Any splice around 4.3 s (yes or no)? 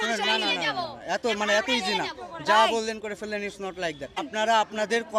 yes